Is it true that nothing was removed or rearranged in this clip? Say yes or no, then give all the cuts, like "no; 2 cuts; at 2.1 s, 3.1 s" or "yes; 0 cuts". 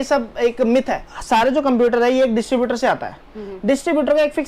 no; 1 cut; at 1.1 s